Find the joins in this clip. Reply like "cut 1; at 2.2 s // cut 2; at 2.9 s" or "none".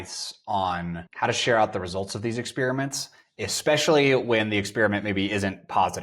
cut 1; at 1.0 s